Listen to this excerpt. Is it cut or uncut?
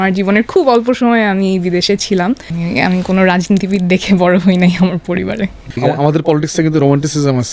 cut